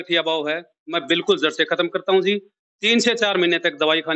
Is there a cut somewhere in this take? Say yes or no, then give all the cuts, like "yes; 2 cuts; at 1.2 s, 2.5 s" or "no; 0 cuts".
no; 0 cuts